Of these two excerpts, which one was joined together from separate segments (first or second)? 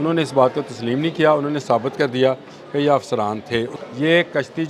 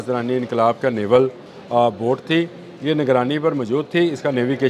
first